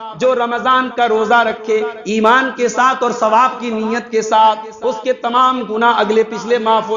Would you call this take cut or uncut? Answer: uncut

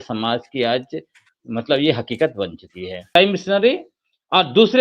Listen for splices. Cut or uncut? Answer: cut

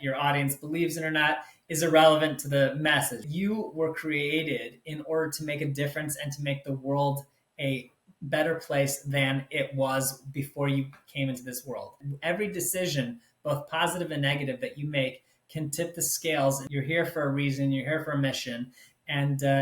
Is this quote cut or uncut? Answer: cut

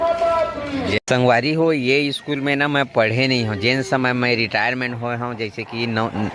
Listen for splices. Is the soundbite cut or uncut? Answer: cut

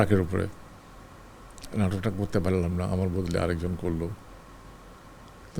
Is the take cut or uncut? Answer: uncut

